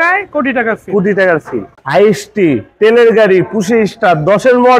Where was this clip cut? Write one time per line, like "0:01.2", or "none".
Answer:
0:01.7